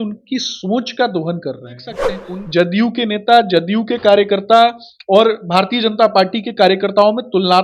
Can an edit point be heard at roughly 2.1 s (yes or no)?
yes